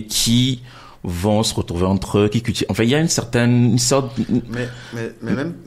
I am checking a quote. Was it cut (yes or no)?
no